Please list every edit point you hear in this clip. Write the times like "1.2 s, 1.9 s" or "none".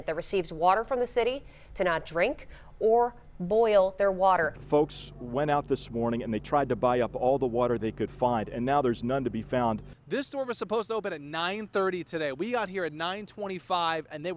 4.6 s, 9.9 s